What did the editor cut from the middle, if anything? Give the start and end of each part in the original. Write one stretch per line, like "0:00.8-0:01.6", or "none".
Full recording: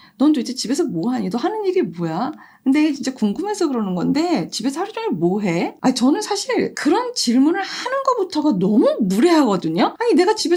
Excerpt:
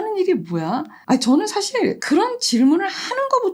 0:02.5-0:05.7